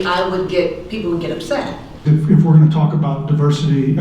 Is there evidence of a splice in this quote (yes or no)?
yes